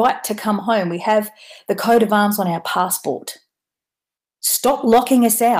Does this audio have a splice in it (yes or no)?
no